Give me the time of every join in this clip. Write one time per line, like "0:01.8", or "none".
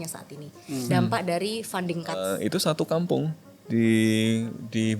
0:02.3